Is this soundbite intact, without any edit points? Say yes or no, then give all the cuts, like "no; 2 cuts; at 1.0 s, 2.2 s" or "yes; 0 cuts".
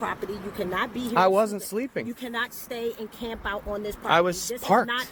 yes; 0 cuts